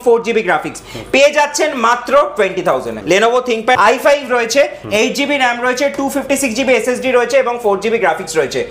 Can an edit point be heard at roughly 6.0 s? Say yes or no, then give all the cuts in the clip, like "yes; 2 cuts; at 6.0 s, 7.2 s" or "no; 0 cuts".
no; 2 cuts; at 2.9 s, 3.8 s